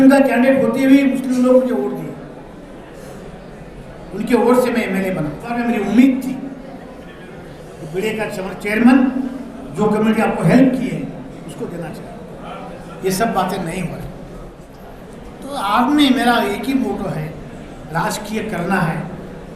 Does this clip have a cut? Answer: yes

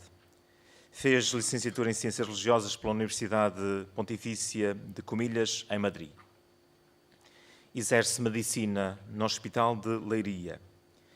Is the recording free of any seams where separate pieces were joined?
no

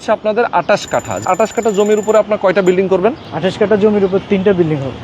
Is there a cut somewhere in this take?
yes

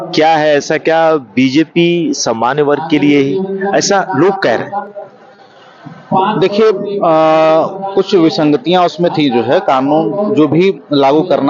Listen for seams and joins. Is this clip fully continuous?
yes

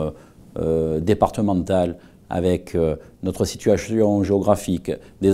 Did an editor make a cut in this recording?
yes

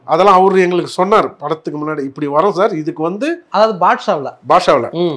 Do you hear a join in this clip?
no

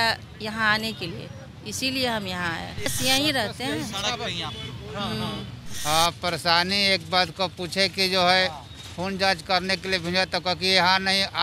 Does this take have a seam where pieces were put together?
yes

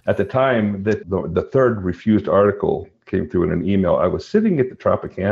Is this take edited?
yes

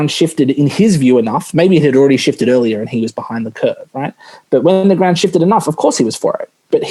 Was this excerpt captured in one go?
yes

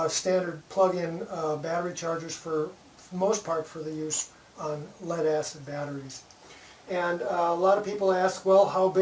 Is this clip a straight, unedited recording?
no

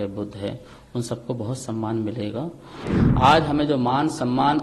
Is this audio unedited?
no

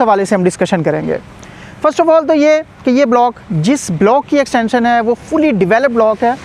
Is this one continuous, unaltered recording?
yes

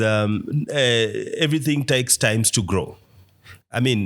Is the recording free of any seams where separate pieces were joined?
yes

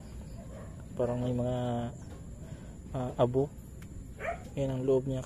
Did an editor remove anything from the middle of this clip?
no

